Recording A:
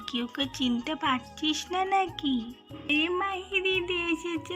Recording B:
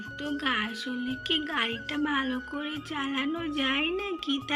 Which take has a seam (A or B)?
A